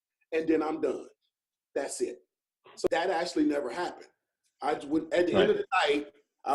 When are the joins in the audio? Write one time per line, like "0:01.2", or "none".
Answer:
0:02.9

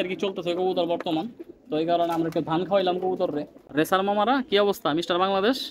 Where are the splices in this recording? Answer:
0:03.7

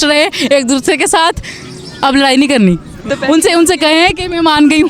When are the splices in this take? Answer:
0:03.1

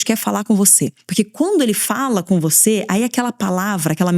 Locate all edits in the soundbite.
0:01.0

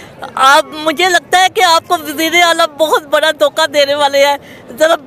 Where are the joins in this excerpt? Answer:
none

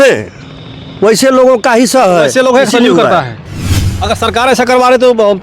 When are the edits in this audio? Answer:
0:03.8

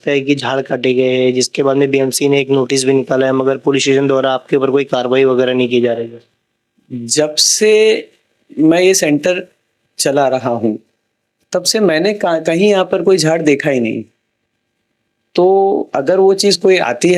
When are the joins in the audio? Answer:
none

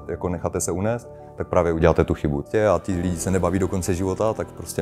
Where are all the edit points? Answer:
0:02.4

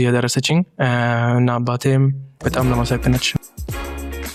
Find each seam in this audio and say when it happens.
none

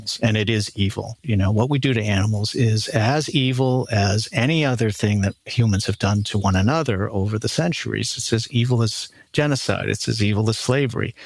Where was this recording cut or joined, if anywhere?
0:01.2

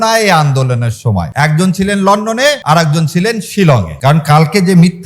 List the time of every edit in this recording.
0:01.3
0:02.6
0:03.9

